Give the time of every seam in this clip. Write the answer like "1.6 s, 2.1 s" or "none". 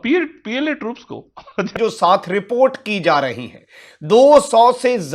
1.7 s